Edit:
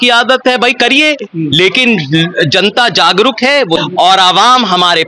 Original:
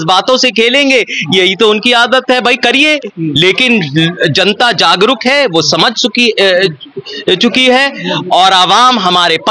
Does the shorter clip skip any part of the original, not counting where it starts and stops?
yes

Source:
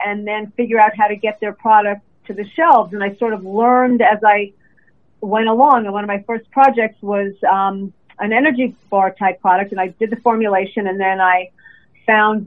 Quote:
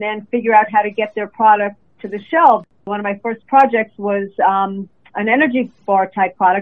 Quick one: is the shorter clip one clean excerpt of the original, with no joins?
no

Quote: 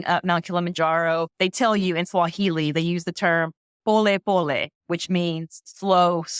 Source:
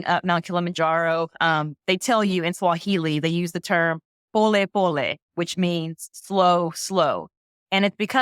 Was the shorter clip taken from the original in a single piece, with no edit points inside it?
no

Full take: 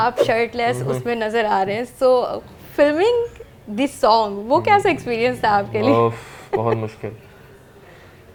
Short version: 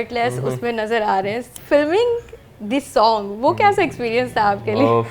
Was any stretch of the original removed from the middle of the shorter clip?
yes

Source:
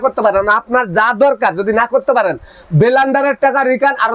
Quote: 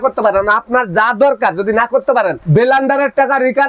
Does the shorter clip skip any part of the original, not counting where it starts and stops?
yes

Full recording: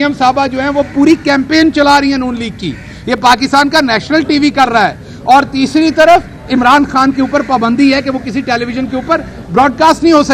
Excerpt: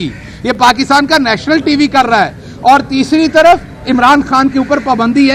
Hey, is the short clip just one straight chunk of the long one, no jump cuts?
yes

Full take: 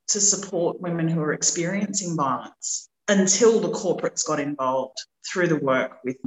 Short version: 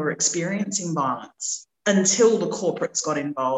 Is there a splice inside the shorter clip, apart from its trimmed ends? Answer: no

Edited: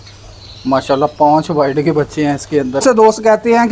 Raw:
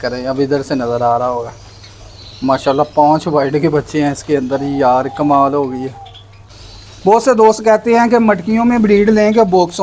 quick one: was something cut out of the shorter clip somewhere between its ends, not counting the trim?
yes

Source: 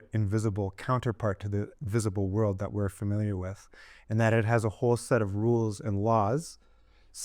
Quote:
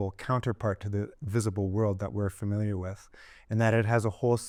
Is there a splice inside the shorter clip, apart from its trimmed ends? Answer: no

